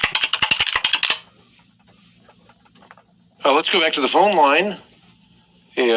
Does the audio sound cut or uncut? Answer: uncut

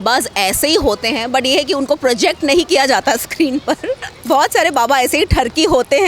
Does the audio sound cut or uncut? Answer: cut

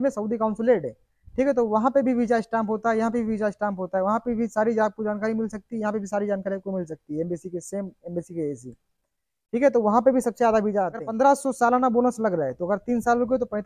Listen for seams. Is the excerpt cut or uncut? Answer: cut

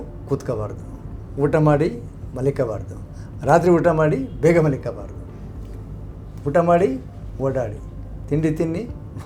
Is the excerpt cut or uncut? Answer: uncut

